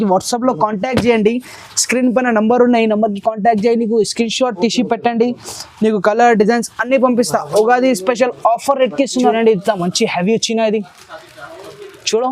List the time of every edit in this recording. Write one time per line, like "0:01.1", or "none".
0:09.3